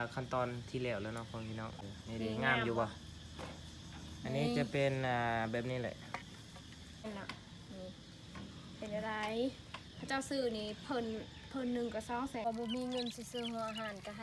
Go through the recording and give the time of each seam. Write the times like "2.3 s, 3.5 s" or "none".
1.9 s, 7.1 s, 12.5 s